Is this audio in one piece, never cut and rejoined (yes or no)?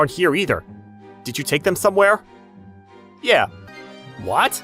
no